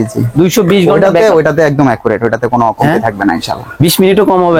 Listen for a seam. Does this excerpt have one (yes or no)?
no